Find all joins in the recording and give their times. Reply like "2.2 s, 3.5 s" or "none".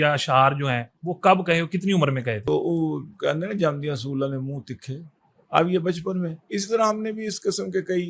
2.5 s